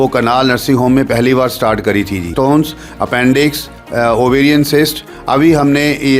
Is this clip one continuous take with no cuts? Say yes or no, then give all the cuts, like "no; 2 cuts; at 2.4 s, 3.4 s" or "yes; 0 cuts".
no; 1 cut; at 2.3 s